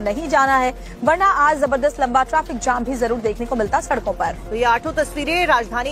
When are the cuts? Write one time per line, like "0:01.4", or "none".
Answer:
none